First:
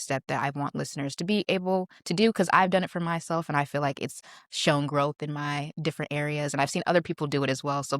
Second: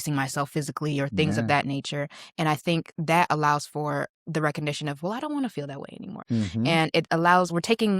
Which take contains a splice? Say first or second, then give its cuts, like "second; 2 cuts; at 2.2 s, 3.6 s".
second; 2 cuts; at 4.2 s, 6.1 s